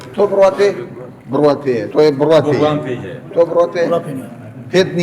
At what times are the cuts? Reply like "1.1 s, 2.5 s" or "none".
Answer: 1.9 s, 3.2 s